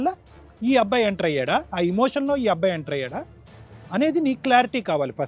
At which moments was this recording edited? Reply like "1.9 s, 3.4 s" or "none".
none